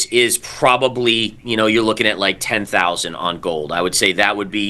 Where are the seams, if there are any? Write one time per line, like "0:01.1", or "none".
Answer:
none